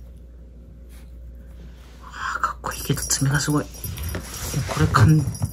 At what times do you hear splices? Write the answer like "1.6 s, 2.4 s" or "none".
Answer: none